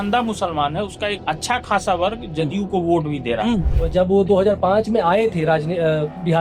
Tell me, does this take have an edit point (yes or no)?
yes